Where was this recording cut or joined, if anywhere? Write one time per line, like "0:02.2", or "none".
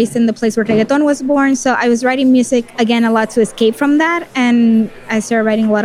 none